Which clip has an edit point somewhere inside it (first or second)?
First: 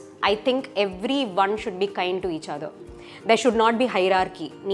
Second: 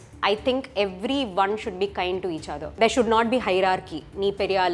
second